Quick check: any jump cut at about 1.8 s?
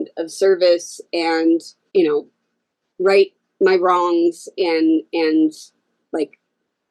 yes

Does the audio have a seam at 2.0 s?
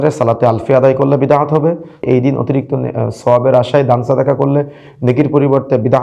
yes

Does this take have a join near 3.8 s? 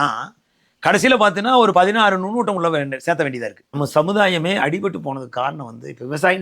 yes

